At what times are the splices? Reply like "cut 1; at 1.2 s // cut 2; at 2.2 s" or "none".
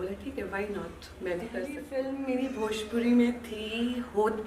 cut 1; at 1.8 s